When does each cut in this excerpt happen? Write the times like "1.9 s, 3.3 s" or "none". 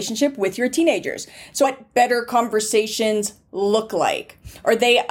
1.6 s